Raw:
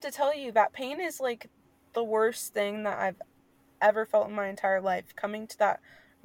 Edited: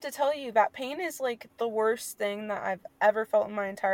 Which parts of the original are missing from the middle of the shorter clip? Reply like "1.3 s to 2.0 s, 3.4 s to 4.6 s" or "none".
1.5 s to 1.8 s, 3.2 s to 3.7 s